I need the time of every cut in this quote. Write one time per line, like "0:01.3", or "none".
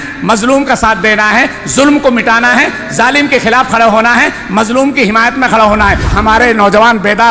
0:06.1